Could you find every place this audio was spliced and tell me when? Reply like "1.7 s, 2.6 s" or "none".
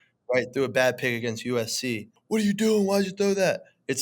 2.1 s

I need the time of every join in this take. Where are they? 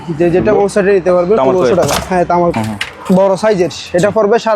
2.5 s

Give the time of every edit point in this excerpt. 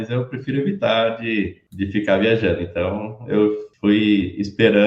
1.6 s, 3.7 s

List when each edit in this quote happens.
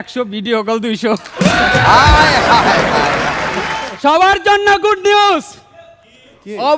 3.8 s

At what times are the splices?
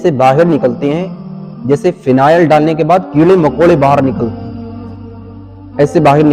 none

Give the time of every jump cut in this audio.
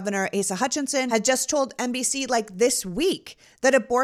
1.1 s

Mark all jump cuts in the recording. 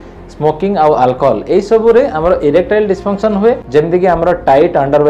3.6 s

